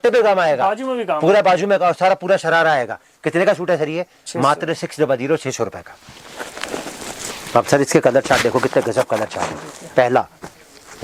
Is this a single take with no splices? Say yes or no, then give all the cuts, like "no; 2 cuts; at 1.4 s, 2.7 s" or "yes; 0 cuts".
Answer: yes; 0 cuts